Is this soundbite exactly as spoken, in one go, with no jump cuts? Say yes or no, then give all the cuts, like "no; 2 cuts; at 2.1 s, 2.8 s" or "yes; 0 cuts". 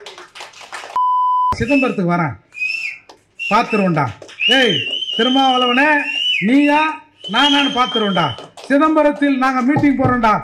no; 1 cut; at 1.0 s